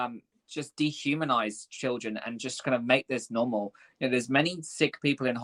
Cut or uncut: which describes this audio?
uncut